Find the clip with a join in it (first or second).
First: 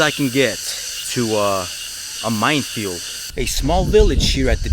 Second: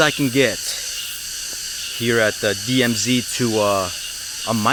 first